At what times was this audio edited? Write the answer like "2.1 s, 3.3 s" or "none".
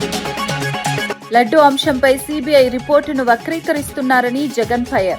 1.2 s